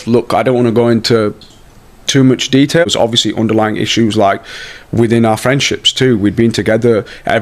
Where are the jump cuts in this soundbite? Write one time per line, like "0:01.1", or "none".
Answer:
0:02.8